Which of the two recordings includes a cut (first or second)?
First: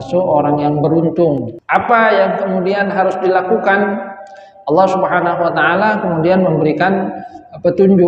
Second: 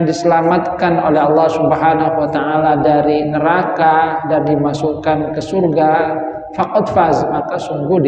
first